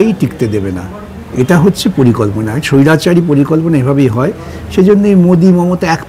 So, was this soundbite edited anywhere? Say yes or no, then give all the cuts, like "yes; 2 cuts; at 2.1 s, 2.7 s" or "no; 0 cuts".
no; 0 cuts